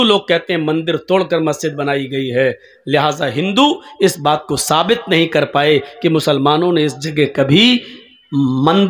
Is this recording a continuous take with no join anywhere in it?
yes; 0 cuts

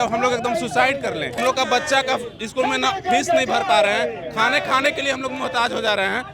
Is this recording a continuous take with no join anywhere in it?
no; 1 cut; at 1.4 s

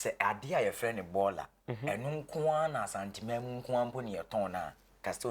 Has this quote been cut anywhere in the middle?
no; 0 cuts

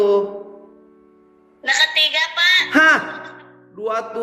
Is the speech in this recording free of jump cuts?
yes; 0 cuts

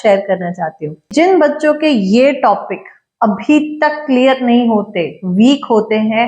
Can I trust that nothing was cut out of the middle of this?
no; 1 cut; at 1.1 s

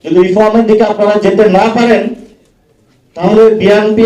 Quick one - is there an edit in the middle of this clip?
no; 0 cuts

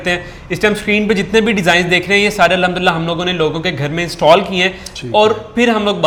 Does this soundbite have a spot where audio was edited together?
no; 0 cuts

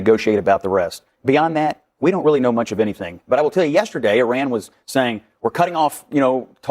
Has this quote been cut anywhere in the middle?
no; 0 cuts

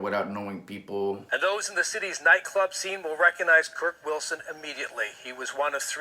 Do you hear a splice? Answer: yes; 1 cut; at 1.2 s

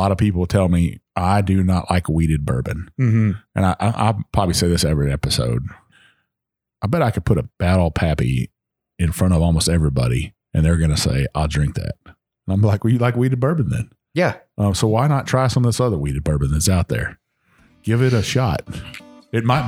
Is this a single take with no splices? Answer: no; 2 cuts; at 5.8 s, 7.5 s

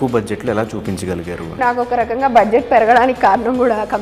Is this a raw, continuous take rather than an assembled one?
no; 1 cut; at 1.5 s

